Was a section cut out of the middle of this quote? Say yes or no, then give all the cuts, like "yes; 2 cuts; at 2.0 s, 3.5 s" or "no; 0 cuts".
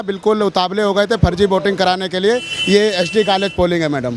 no; 0 cuts